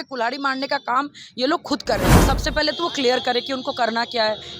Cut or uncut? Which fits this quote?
cut